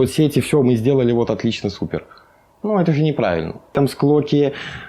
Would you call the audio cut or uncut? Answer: cut